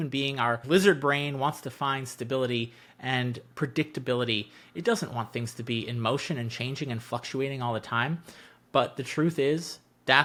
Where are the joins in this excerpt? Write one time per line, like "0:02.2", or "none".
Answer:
none